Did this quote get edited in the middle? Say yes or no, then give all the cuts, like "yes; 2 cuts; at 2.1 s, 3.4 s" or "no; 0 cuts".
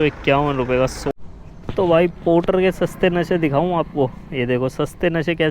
yes; 1 cut; at 1.2 s